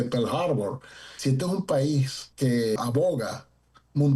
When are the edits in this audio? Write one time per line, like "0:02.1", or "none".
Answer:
0:01.1
0:02.7